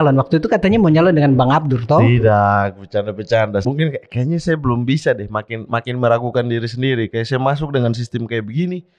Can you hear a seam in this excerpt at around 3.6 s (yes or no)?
yes